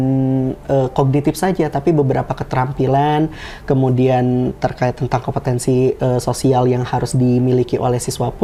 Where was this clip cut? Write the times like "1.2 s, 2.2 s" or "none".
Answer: none